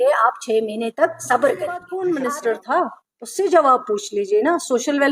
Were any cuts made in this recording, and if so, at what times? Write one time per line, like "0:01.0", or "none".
0:01.9